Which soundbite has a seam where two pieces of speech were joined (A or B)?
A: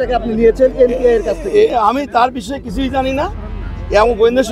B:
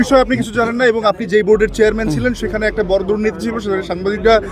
A